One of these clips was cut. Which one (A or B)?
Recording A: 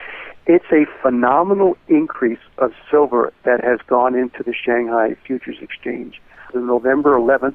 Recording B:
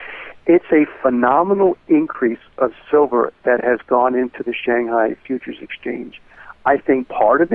A